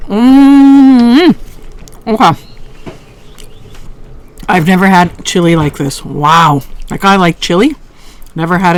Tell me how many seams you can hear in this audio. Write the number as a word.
zero